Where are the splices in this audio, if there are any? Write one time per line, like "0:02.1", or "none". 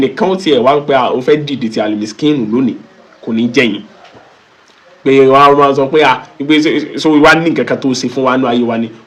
none